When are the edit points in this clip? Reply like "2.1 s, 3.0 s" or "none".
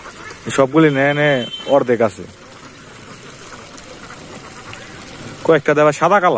none